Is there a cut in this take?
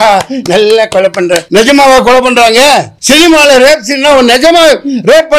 yes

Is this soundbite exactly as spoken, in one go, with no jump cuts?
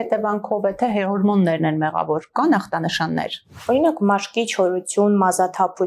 no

